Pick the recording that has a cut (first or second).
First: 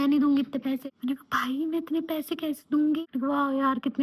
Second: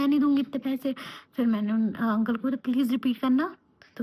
first